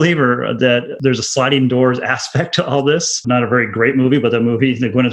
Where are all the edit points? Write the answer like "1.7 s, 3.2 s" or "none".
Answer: 0.9 s, 3.2 s